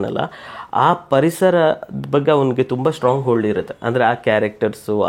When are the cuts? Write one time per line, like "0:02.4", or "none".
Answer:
none